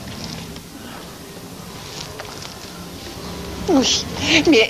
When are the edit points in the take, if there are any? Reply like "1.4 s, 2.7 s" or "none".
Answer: 3.2 s